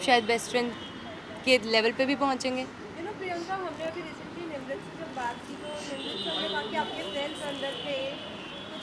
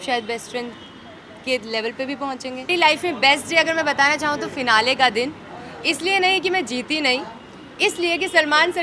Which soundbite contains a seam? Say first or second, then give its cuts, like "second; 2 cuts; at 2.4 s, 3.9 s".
second; 1 cut; at 2.7 s